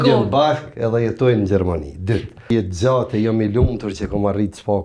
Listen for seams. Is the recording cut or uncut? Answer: cut